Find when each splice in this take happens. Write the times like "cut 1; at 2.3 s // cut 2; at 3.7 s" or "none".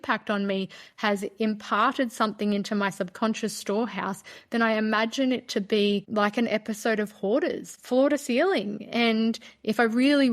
cut 1; at 6.1 s // cut 2; at 7.7 s